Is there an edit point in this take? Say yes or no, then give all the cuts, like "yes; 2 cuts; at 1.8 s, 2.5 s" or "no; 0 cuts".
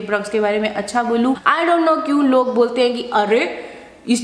yes; 1 cut; at 1.4 s